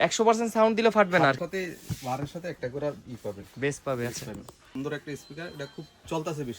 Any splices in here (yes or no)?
yes